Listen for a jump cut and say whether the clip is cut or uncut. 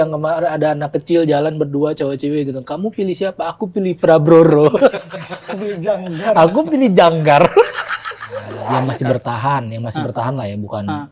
cut